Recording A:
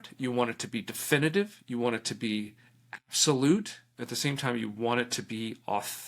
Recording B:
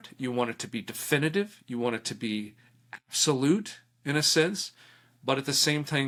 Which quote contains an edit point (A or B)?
A